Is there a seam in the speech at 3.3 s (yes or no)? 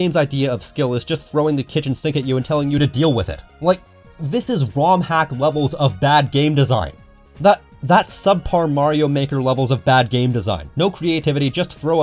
no